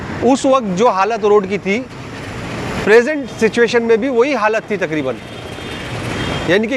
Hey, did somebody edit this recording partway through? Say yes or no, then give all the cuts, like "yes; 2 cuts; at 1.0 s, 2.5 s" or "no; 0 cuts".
no; 0 cuts